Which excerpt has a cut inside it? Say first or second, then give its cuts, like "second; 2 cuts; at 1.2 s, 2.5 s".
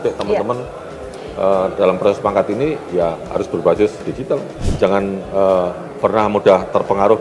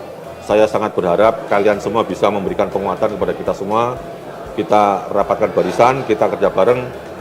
first; 1 cut; at 4.6 s